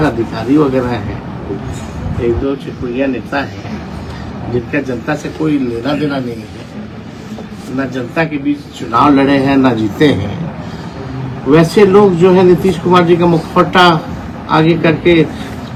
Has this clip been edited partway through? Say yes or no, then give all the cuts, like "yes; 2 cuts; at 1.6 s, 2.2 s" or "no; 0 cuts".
no; 0 cuts